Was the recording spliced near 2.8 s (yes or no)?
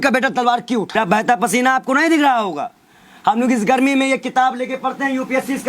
no